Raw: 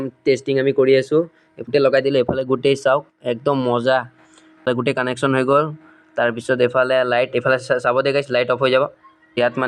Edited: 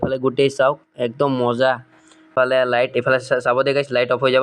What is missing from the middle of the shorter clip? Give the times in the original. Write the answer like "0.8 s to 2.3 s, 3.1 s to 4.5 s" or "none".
4.6 s to 6.7 s